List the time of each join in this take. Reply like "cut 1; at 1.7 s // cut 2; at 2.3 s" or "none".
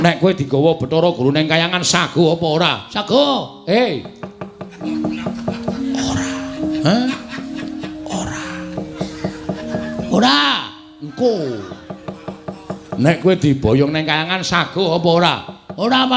cut 1; at 4.8 s